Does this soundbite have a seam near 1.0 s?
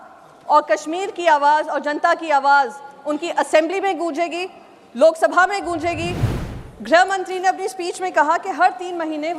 no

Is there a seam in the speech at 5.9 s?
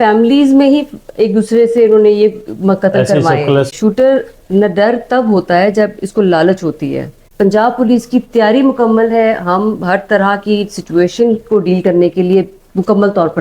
no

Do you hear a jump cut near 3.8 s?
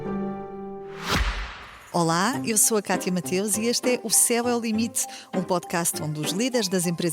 no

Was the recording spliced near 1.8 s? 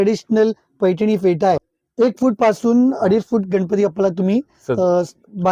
yes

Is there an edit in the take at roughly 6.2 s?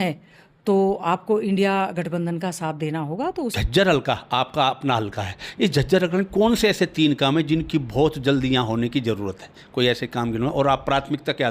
no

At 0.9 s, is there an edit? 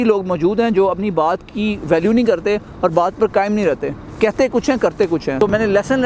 no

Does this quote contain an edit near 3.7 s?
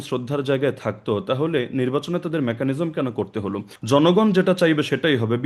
yes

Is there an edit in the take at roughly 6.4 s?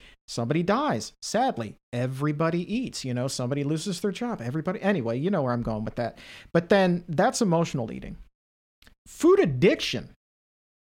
no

